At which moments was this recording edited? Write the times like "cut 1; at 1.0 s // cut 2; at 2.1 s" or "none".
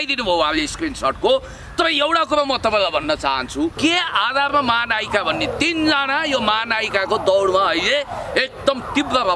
cut 1; at 3.8 s